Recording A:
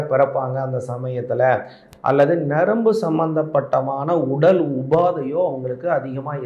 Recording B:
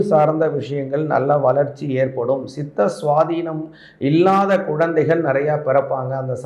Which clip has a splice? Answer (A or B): A